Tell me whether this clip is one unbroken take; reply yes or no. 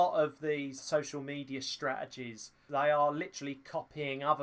no